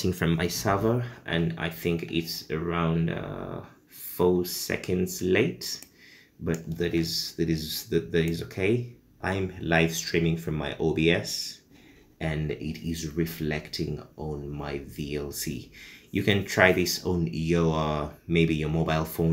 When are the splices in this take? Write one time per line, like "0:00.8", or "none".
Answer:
0:09.2